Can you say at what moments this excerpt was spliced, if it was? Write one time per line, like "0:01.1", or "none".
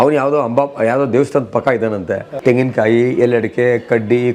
0:02.3

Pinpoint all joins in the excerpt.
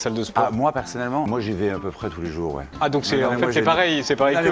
0:01.3
0:02.7

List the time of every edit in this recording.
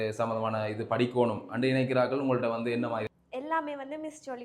0:03.1

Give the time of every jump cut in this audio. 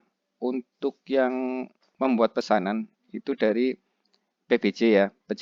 none

